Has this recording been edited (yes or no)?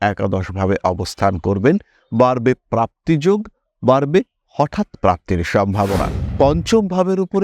yes